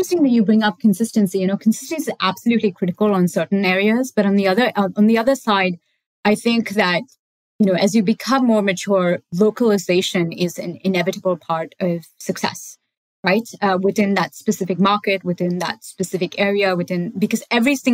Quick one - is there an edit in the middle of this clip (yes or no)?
no